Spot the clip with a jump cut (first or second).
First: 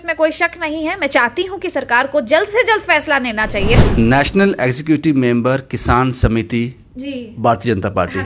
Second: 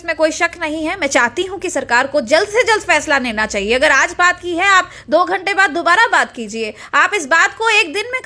first